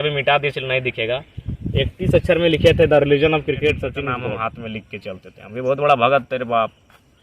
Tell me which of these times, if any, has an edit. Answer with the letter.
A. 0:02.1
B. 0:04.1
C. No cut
B